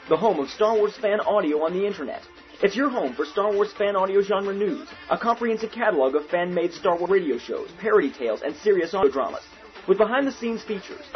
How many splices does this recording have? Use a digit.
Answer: 2